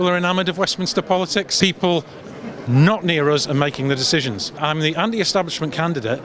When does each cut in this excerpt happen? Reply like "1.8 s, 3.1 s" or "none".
1.5 s, 4.6 s